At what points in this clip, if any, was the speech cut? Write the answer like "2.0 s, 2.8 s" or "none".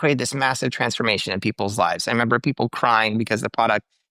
none